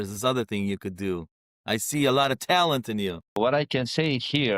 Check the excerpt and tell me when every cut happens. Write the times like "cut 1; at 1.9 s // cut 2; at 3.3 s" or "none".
cut 1; at 3.4 s

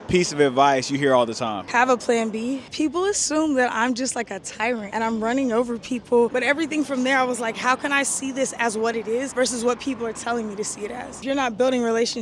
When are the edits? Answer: cut 1; at 2.6 s // cut 2; at 6.3 s // cut 3; at 11.2 s

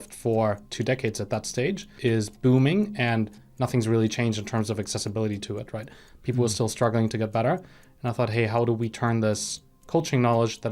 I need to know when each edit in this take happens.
cut 1; at 1.9 s

